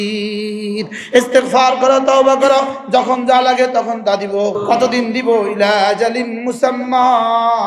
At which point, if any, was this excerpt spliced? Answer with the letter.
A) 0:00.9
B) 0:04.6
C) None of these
B